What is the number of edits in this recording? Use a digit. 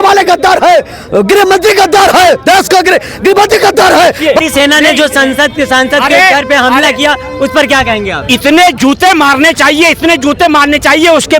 1